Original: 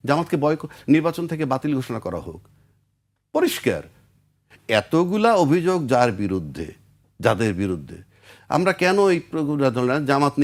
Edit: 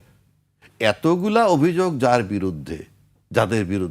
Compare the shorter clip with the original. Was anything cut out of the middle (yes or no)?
no